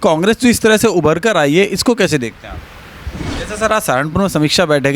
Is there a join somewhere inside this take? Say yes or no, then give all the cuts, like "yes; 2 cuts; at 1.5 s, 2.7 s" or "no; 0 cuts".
yes; 1 cut; at 3.0 s